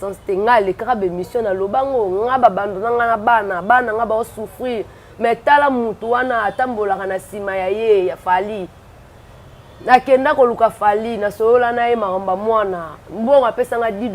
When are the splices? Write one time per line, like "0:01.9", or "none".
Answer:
none